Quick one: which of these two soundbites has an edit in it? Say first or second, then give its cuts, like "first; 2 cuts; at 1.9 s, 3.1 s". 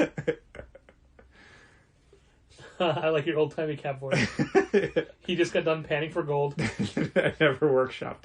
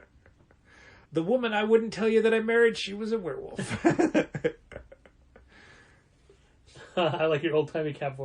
second; 1 cut; at 1.0 s